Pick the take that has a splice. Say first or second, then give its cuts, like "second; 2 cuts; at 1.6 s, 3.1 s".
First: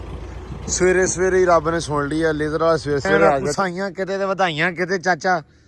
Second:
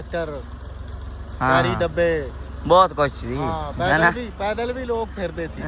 first; 1 cut; at 3.5 s